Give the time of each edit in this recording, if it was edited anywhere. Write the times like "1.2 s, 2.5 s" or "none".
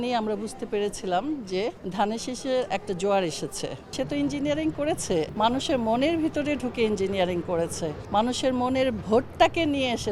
1.8 s, 3.9 s, 5.3 s, 8.0 s